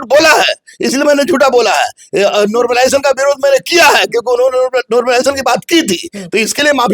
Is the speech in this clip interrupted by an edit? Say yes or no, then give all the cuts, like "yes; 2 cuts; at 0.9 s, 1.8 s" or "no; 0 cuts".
no; 0 cuts